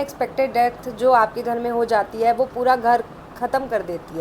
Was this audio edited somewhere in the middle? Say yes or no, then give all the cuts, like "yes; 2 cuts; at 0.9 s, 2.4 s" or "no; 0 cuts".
no; 0 cuts